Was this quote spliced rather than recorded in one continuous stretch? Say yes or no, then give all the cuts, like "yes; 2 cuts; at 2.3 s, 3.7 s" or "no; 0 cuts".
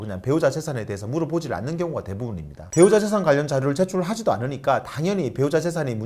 no; 0 cuts